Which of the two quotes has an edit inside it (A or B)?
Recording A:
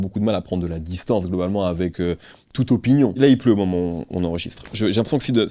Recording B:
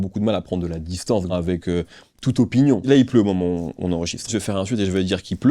B